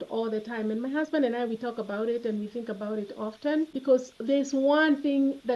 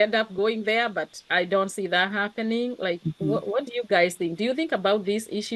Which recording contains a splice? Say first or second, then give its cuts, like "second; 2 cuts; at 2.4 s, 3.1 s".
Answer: first; 1 cut; at 3.8 s